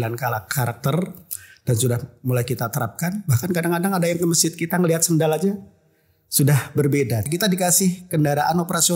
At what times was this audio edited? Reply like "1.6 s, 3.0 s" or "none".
7.3 s